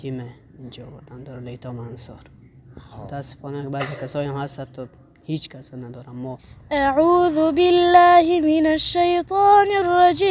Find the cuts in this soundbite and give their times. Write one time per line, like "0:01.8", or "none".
0:03.0
0:06.5